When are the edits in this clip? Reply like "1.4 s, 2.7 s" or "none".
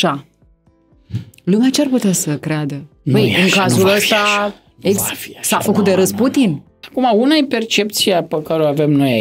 6.8 s